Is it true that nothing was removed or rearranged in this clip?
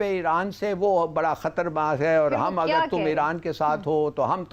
yes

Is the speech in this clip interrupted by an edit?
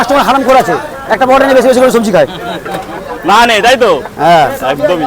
no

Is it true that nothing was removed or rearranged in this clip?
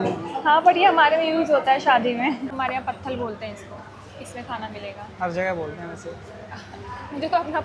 no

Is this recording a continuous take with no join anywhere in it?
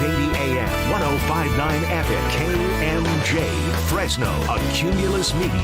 yes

